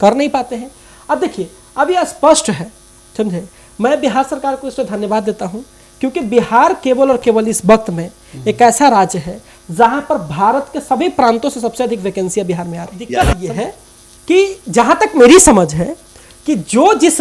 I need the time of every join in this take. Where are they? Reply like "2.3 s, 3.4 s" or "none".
13.0 s